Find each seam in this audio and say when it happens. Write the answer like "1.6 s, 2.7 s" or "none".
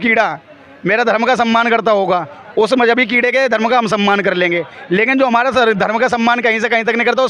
none